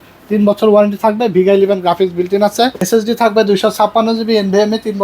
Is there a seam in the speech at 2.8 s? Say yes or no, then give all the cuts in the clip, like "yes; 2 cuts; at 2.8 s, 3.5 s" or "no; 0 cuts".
yes; 1 cut; at 2.8 s